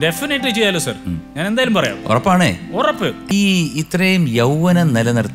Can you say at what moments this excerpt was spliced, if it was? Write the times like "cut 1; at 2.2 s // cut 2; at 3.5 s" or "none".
cut 1; at 3.2 s